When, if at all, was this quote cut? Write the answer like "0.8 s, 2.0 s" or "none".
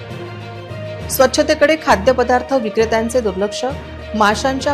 1.1 s